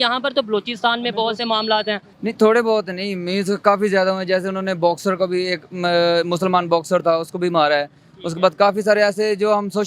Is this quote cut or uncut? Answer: cut